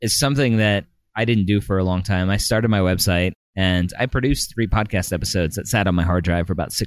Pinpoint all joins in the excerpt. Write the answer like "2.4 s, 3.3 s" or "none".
none